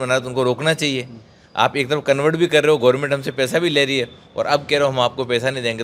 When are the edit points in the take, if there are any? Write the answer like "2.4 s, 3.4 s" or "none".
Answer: none